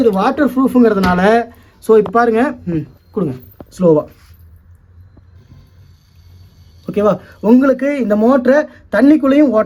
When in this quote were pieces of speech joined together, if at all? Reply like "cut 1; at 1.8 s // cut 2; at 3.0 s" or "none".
none